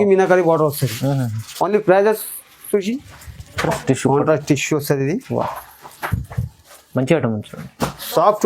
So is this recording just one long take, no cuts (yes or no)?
no